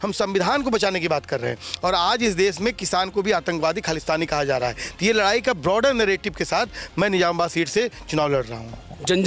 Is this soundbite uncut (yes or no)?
yes